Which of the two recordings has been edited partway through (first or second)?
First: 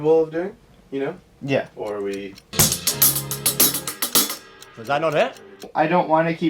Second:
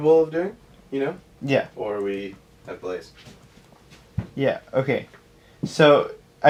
first